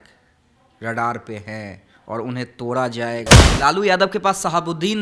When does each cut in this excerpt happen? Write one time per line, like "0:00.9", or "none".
0:03.4